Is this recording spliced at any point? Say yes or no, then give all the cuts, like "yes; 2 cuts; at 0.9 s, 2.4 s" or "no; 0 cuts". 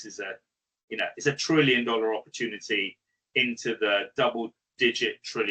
no; 0 cuts